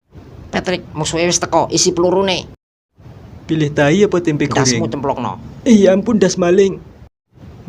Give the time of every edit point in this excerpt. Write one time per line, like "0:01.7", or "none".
none